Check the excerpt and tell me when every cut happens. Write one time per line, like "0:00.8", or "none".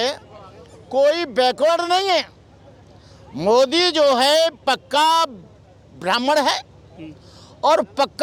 none